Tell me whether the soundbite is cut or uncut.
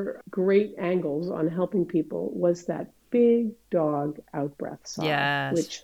uncut